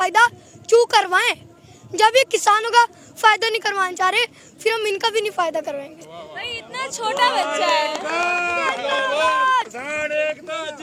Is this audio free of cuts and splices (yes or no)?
yes